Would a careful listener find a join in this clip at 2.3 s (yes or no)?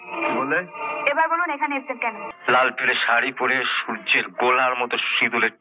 yes